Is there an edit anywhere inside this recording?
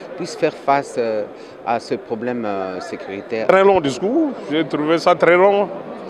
yes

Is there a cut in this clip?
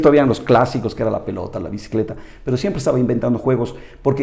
no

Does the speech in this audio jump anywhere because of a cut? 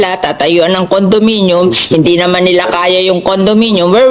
no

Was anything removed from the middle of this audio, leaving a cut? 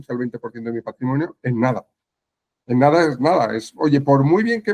no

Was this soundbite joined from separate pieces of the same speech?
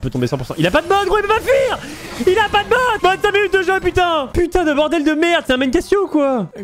no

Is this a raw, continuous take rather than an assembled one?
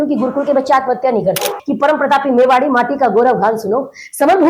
no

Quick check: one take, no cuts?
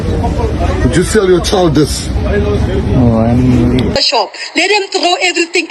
no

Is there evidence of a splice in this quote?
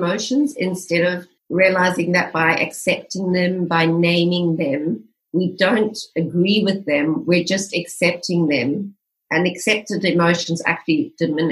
yes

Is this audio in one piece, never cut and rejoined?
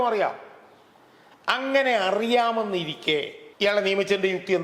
no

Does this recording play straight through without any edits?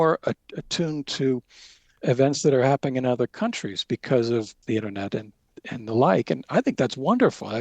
no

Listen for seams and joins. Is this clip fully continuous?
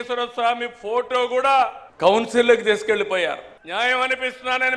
no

